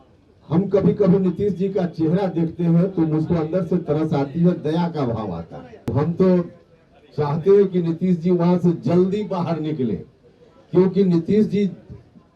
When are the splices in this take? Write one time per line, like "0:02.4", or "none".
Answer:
0:05.9